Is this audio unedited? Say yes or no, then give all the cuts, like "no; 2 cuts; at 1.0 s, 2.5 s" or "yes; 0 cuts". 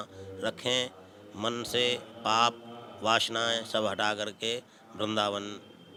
yes; 0 cuts